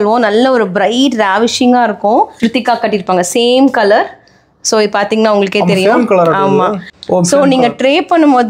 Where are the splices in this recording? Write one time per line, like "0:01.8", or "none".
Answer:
0:02.3
0:06.9